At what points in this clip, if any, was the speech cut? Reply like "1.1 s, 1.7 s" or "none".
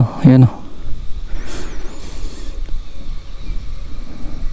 none